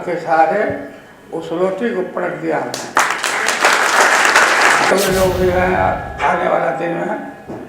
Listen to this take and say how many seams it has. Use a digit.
1